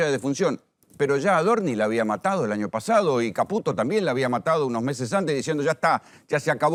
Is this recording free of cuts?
yes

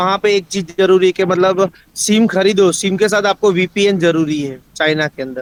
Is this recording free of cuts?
yes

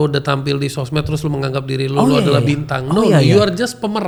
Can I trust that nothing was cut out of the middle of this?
yes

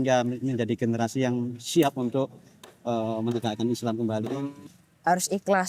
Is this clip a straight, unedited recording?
no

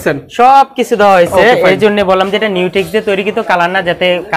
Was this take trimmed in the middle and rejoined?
no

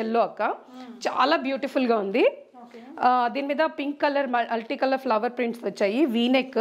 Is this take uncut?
yes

